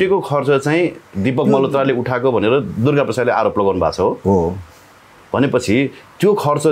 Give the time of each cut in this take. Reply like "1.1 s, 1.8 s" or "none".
none